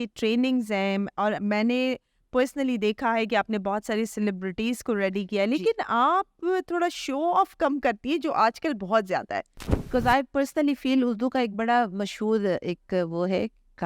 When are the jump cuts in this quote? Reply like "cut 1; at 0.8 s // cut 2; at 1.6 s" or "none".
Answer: cut 1; at 9.8 s